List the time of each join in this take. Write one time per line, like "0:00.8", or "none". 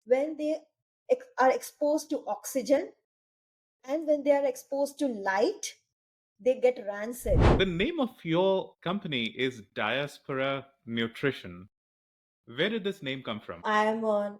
0:07.5
0:08.7
0:13.6